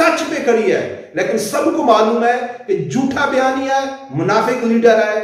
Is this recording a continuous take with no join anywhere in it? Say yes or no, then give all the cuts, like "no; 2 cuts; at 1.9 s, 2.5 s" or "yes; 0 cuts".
yes; 0 cuts